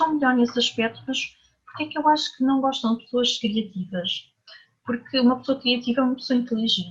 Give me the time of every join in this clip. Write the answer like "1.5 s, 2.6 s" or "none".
none